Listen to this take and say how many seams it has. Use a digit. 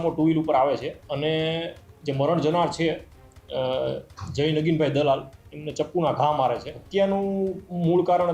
2